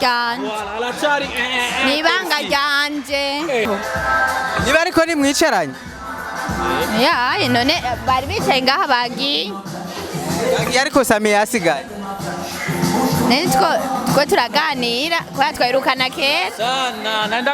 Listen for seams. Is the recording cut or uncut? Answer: cut